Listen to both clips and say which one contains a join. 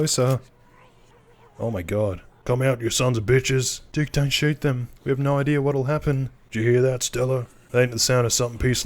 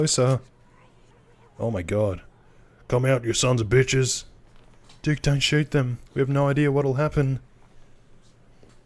first; 4 cuts; at 2.3 s, 3.8 s, 6.4 s, 7.6 s

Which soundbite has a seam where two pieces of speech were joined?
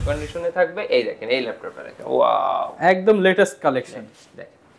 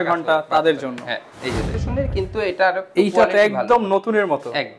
second; 1 cut; at 1.8 s

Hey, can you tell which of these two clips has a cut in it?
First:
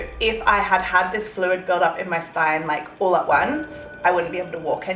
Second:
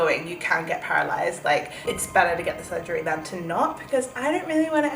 second; 1 cut; at 1.8 s

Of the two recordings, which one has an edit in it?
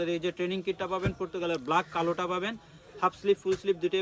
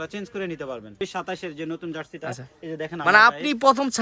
second; 1 cut; at 1.0 s

